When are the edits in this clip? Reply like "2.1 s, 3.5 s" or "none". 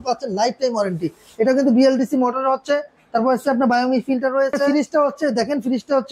4.7 s